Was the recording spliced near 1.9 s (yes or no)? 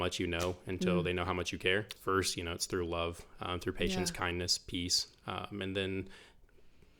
yes